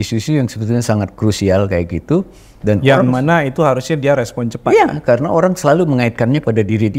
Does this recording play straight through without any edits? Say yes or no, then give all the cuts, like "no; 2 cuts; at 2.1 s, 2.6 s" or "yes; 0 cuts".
yes; 0 cuts